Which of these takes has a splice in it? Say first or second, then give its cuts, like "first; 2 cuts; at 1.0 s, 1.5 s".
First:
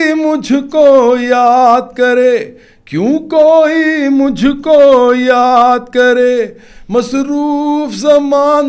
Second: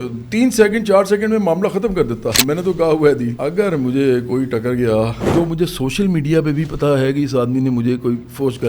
second; 3 cuts; at 2.4 s, 3.4 s, 5.2 s